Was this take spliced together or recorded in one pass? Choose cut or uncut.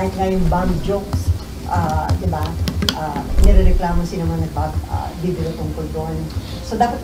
uncut